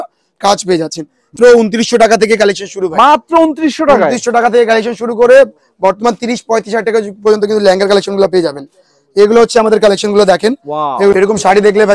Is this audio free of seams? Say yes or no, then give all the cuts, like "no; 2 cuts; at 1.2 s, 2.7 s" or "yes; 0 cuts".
no; 2 cuts; at 1.3 s, 11.1 s